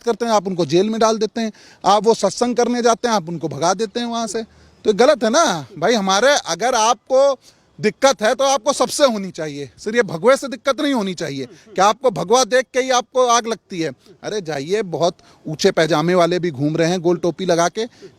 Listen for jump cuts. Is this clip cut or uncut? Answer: uncut